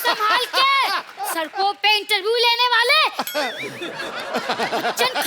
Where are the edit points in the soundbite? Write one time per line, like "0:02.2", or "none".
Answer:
0:01.2